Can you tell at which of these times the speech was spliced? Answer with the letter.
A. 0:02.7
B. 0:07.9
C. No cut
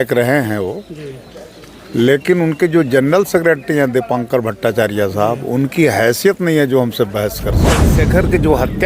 B